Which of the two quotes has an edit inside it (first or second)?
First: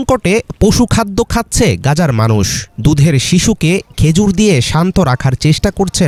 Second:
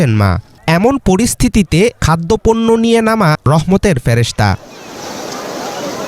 second